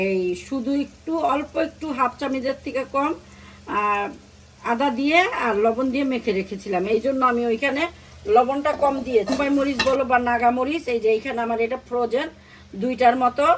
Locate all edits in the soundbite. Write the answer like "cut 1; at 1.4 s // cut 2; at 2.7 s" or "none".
cut 1; at 9.3 s